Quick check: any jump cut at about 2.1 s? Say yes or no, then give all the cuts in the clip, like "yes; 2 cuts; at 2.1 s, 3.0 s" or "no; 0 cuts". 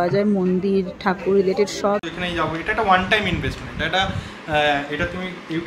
yes; 1 cut; at 2.1 s